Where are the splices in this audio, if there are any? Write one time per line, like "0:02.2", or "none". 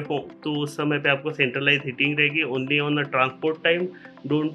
none